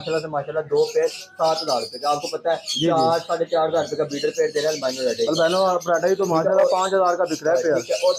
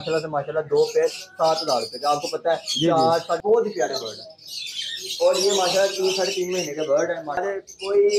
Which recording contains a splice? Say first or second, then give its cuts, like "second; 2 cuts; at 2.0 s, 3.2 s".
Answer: second; 2 cuts; at 3.4 s, 7.4 s